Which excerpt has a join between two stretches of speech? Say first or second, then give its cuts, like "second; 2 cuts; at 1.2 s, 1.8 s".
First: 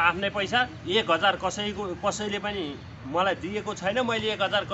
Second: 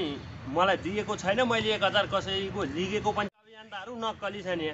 second; 1 cut; at 3.3 s